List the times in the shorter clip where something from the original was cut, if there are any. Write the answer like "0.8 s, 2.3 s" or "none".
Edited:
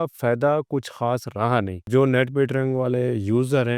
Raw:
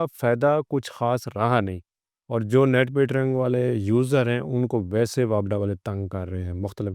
1.9 s